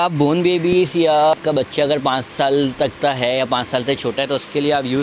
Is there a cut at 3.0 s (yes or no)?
no